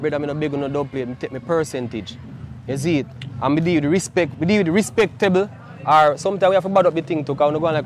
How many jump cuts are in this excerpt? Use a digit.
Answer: 0